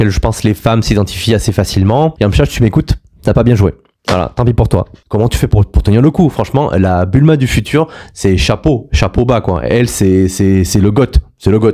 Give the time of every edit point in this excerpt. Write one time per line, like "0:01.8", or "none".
0:02.1
0:05.0